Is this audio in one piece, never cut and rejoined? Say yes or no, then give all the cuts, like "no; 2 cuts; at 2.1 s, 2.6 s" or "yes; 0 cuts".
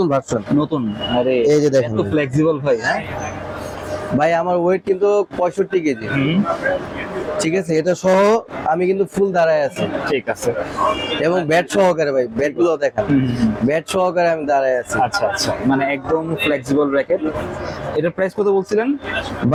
yes; 0 cuts